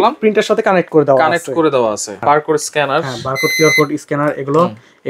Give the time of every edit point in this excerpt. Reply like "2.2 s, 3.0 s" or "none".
2.2 s